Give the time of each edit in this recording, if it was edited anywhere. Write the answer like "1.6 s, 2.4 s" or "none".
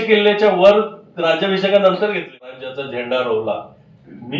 2.7 s